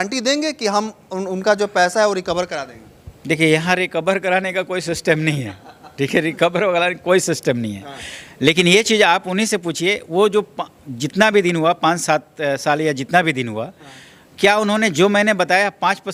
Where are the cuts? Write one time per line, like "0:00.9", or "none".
none